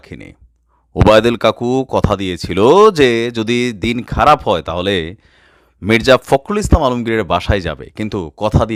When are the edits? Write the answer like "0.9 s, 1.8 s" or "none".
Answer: none